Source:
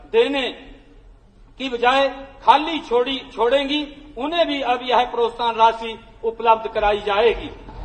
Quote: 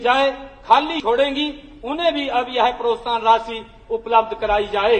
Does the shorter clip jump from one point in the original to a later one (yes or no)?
yes